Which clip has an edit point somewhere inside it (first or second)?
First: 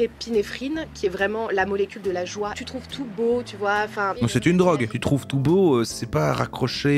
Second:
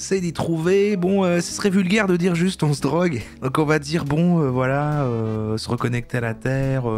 first